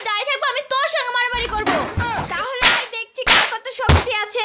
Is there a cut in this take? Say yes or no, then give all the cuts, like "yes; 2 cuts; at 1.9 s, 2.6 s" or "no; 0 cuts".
no; 0 cuts